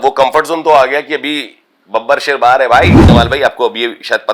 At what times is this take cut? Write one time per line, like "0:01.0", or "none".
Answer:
0:03.0

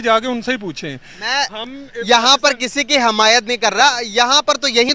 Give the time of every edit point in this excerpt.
0:04.0

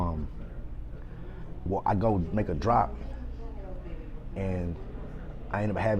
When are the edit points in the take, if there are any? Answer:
none

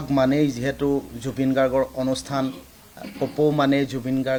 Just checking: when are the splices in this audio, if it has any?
none

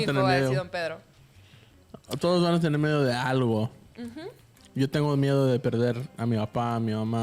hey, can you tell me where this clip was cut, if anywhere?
none

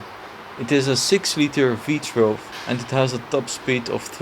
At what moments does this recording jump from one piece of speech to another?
0:02.5

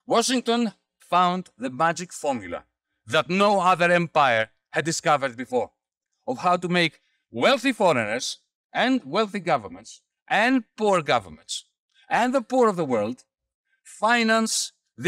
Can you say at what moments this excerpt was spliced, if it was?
0:00.9

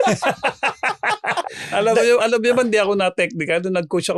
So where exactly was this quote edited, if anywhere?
0:01.5

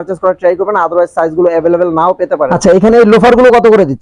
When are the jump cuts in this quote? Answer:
0:02.5

